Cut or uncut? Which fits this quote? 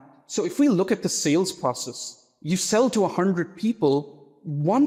uncut